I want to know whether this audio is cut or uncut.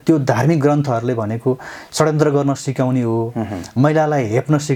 uncut